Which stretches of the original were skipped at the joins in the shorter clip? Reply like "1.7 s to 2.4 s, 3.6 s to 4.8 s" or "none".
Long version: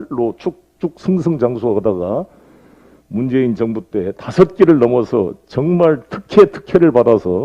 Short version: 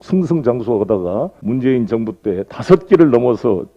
2.3 s to 3.0 s